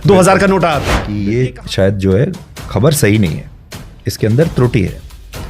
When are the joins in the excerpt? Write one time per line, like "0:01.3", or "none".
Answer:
0:01.0